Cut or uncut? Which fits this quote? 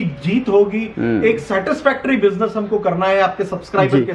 uncut